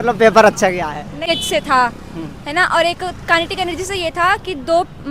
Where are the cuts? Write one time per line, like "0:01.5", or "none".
0:01.2